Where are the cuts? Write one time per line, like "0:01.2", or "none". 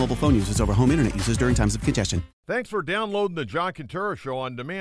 0:02.3